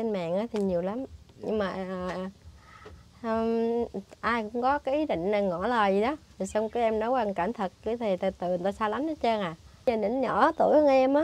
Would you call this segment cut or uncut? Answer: cut